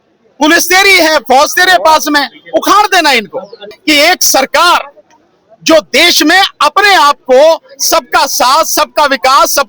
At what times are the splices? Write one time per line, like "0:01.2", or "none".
0:03.7